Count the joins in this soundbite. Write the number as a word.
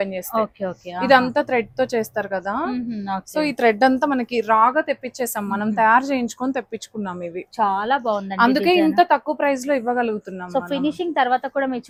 zero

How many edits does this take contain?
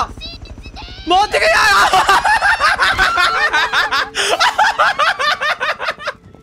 zero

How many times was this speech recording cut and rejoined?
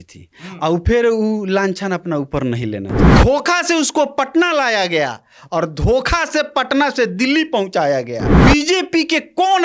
two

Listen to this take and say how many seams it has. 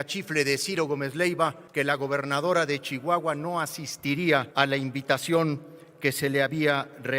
two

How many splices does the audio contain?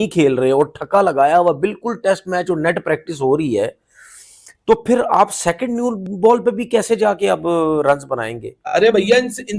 one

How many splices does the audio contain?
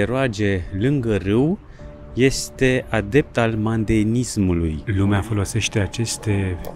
one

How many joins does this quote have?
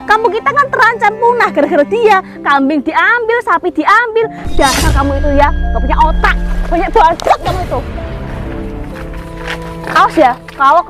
one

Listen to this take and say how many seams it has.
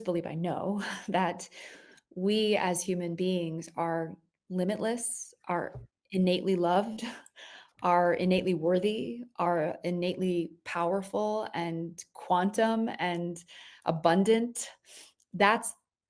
zero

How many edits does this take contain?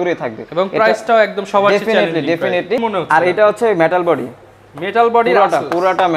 one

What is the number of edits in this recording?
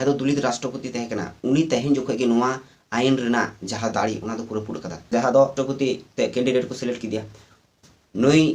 one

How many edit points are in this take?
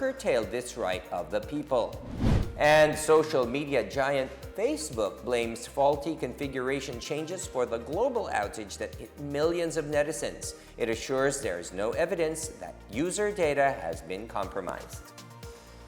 one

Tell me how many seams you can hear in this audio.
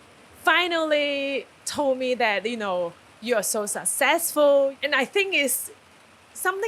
three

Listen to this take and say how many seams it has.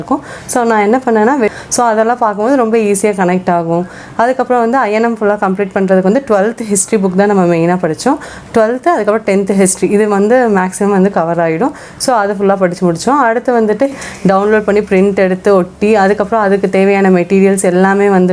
two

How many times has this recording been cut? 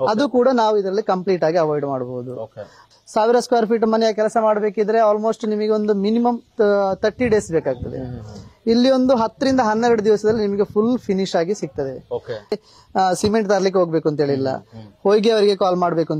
two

